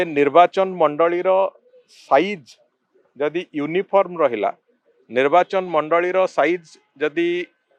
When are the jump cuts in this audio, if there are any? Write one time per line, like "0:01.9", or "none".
none

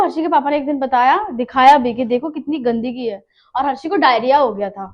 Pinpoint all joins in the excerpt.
none

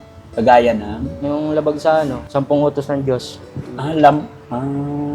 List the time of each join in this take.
0:01.1
0:02.2

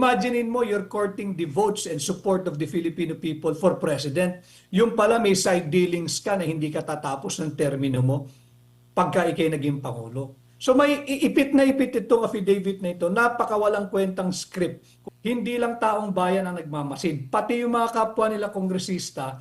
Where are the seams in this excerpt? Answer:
0:15.0

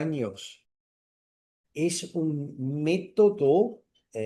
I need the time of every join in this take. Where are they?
0:01.3

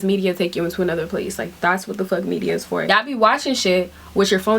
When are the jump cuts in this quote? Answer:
0:02.8

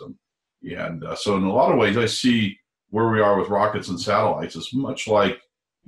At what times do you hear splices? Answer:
none

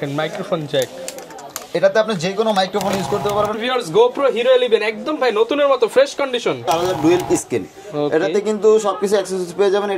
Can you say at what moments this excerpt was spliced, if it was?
0:03.6
0:06.6

